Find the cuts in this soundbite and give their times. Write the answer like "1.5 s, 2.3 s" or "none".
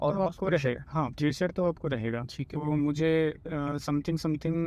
2.6 s